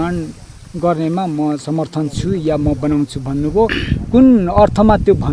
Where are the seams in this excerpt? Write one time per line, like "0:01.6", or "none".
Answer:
none